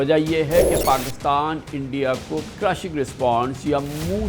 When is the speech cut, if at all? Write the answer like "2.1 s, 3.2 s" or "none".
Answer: 2.5 s